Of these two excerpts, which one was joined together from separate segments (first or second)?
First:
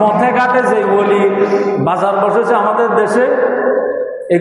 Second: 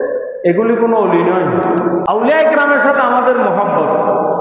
second